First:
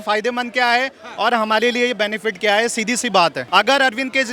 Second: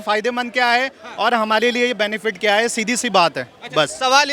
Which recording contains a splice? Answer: first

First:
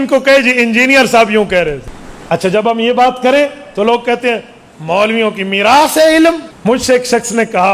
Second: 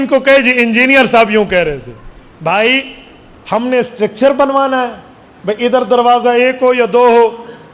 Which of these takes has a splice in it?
first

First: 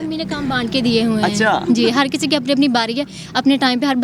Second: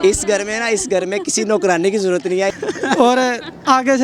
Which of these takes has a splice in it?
second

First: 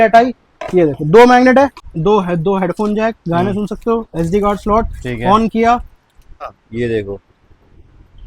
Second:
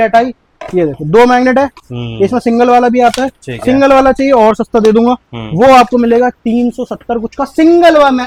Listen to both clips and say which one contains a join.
first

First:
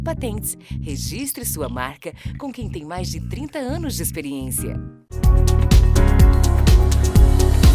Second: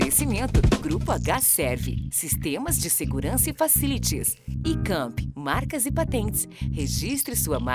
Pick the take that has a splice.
first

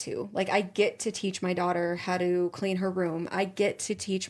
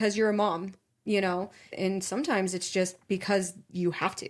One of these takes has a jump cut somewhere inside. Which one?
second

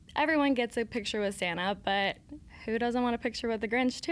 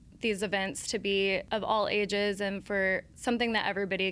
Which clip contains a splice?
second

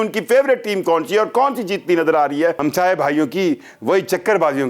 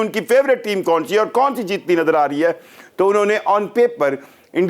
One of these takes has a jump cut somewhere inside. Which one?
first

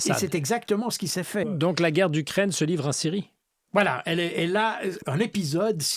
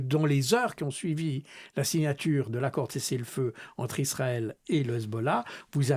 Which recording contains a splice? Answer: first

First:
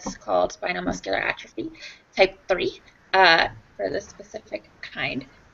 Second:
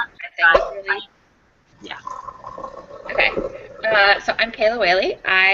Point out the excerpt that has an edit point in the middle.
second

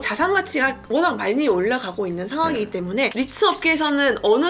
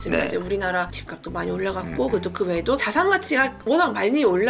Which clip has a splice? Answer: first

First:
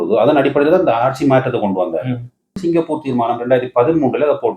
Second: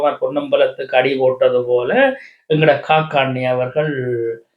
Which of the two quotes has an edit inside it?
first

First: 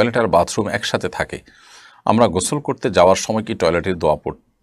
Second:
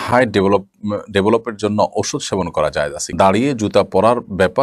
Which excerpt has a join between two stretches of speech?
second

